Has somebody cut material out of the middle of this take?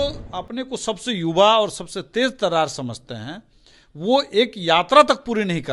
no; 0 cuts

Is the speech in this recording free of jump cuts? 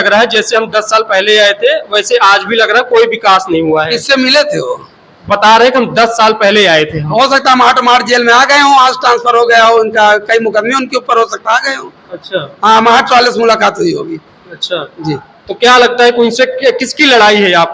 yes; 0 cuts

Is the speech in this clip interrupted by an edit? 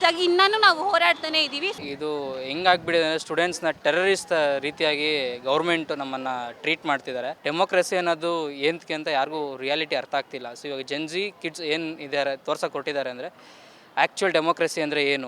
yes; 2 cuts; at 1.8 s, 7.4 s

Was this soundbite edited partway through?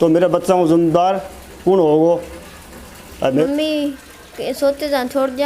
yes; 1 cut; at 3.5 s

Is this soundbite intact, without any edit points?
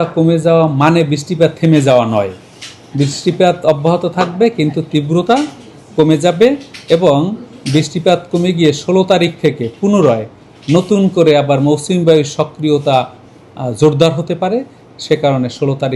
yes; 0 cuts

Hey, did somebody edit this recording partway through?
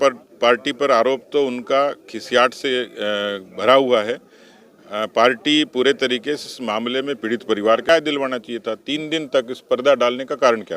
yes; 1 cut; at 7.9 s

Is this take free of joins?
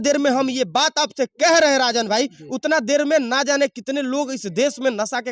yes; 0 cuts

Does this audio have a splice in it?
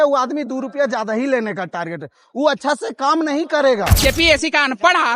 yes; 1 cut; at 4.0 s

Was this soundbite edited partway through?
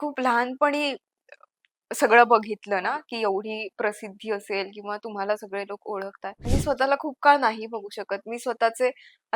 yes; 1 cut; at 6.5 s

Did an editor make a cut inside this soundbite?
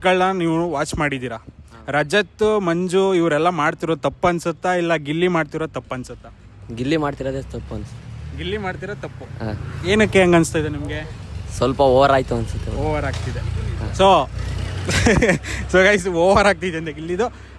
no; 0 cuts

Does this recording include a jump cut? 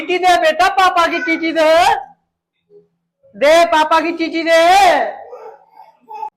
no; 0 cuts

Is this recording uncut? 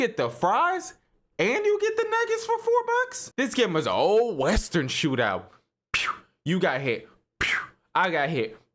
no; 1 cut; at 3.2 s

